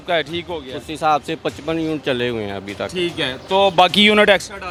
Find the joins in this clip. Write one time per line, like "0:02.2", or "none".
none